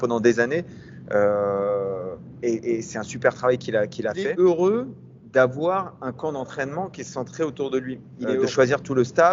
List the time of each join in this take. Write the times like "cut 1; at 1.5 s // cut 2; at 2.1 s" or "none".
cut 1; at 4.2 s // cut 2; at 8.4 s